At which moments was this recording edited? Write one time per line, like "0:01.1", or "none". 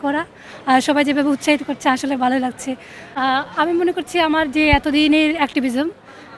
0:03.0